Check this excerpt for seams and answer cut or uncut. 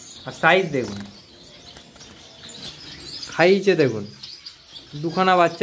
cut